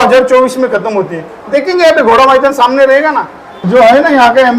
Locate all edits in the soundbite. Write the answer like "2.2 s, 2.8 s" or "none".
3.6 s